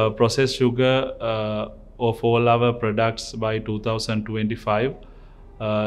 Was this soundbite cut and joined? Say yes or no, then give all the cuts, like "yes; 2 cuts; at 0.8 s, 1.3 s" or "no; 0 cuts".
no; 0 cuts